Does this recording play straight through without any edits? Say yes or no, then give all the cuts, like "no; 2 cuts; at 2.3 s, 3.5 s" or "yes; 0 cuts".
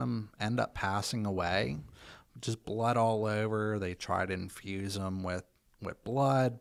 yes; 0 cuts